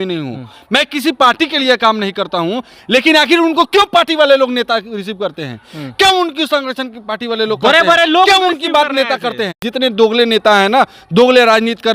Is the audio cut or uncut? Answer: cut